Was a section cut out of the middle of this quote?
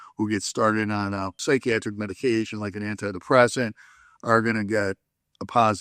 yes; 1 cut; at 1.3 s

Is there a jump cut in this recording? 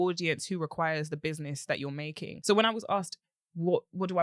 yes; 1 cut; at 2.3 s

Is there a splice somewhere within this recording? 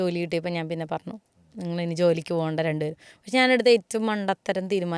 no; 0 cuts

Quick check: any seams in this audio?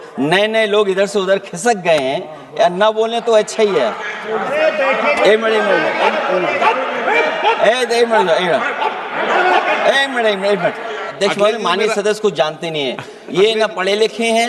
yes; 2 cuts; at 4.2 s, 11.1 s

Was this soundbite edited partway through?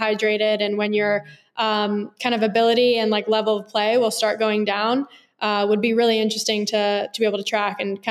no; 0 cuts

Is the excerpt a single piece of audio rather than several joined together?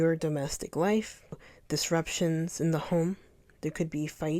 no; 1 cut; at 1.5 s

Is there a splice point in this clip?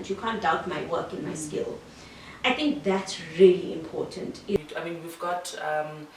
yes; 1 cut; at 4.6 s

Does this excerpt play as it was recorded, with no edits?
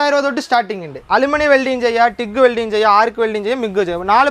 no; 1 cut; at 0.9 s

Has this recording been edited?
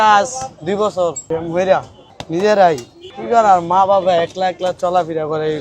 yes; 2 cuts; at 1.2 s, 2.0 s

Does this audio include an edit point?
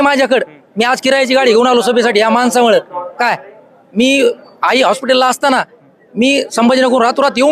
no; 0 cuts

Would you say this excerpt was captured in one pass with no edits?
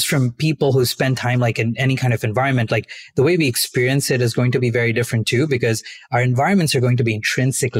yes; 0 cuts

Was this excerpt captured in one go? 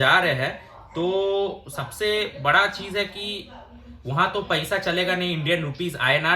yes; 0 cuts

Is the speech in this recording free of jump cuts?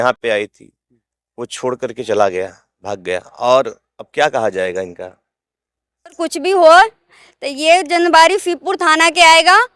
no; 1 cut; at 6.2 s

